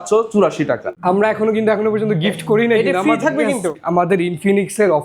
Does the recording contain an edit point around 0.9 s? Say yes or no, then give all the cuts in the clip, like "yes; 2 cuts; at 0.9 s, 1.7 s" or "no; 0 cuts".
yes; 2 cuts; at 0.9 s, 3.8 s